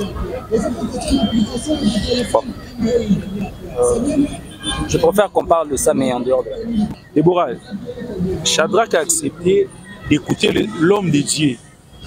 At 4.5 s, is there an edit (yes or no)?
no